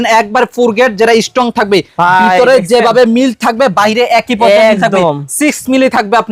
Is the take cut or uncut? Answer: uncut